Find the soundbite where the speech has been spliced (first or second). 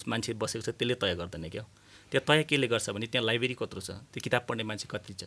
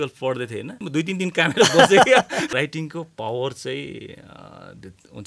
second